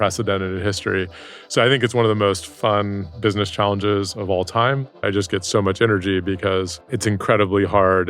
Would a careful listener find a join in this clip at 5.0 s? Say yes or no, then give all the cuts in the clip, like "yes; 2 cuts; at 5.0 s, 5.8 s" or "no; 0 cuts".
yes; 2 cuts; at 5.0 s, 6.9 s